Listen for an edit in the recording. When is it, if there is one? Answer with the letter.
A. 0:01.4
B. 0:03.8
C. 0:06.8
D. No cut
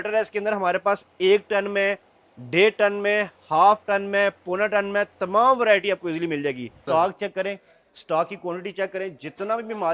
C